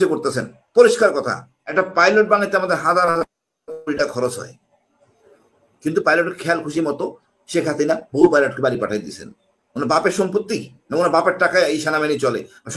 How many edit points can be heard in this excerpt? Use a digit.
1